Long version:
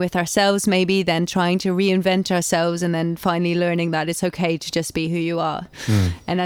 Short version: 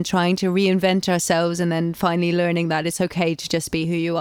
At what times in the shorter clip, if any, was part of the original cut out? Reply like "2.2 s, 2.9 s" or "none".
none